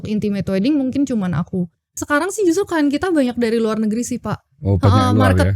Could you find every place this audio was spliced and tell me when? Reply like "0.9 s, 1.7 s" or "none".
2.0 s